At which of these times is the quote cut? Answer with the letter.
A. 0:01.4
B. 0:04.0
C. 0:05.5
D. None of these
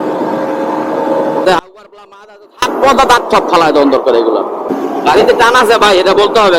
A